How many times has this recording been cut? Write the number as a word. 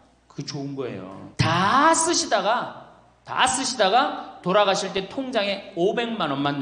one